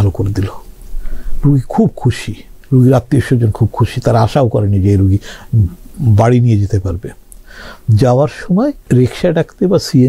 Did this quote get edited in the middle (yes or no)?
yes